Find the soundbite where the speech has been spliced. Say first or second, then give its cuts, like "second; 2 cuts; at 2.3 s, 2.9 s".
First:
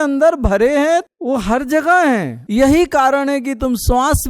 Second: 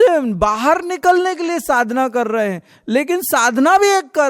first; 2 cuts; at 1.1 s, 2.4 s